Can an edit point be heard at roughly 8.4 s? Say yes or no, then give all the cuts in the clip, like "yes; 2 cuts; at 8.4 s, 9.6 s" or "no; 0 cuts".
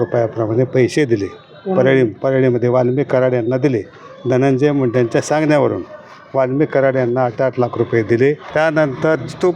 yes; 1 cut; at 8.4 s